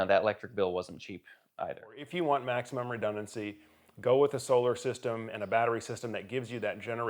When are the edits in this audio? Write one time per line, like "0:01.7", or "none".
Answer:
0:02.1